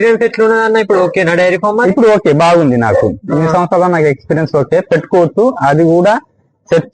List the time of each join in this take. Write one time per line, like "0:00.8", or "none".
none